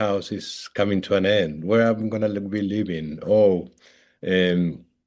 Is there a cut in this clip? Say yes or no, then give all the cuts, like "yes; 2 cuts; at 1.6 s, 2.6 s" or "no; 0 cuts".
no; 0 cuts